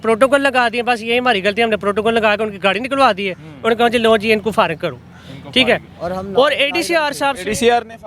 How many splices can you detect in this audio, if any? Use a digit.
0